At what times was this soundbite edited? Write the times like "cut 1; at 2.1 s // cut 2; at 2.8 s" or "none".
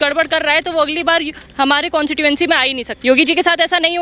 cut 1; at 2.9 s